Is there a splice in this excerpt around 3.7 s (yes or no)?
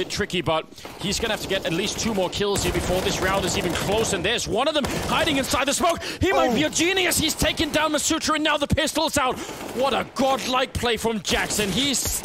no